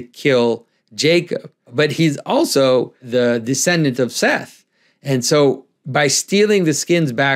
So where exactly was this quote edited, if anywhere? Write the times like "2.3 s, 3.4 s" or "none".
1.7 s, 3.1 s